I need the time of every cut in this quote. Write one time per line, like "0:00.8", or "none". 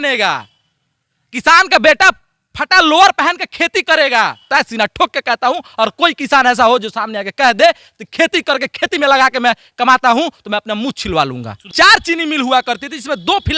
0:04.5
0:11.7